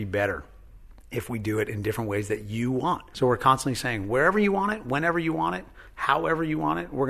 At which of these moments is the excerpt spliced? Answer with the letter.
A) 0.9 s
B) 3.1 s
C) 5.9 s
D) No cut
B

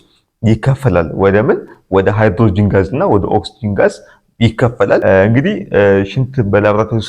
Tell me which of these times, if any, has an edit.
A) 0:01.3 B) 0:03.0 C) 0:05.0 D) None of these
C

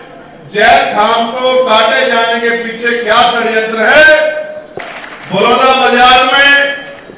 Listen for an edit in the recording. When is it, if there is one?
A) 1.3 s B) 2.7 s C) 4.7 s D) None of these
C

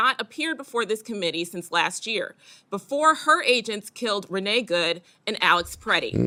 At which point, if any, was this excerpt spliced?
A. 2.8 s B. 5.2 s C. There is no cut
C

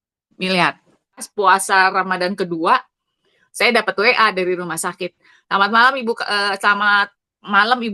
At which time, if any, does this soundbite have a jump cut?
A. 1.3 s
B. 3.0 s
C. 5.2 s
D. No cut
A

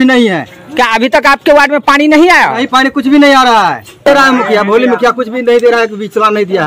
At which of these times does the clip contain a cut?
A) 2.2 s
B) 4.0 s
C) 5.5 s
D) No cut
B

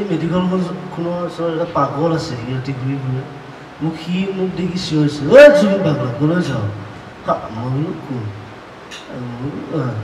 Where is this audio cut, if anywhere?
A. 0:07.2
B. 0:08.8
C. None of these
C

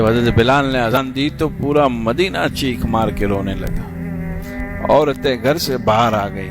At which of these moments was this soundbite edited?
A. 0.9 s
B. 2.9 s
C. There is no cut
A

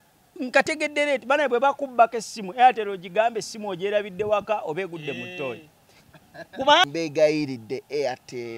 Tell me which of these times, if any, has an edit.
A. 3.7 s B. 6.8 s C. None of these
B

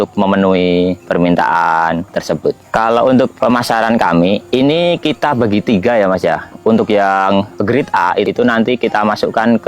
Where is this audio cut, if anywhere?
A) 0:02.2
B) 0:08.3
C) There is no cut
B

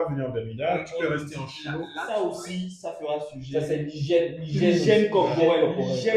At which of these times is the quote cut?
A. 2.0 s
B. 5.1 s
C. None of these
A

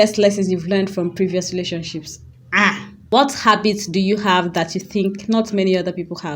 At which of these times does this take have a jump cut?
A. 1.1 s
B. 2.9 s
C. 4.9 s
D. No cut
B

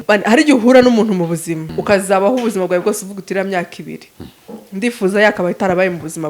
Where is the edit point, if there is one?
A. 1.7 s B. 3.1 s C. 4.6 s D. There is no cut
A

